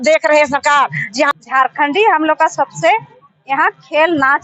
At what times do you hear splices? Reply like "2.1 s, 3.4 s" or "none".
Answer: 1.3 s